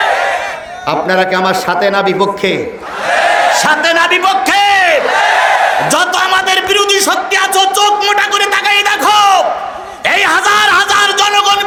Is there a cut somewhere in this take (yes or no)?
no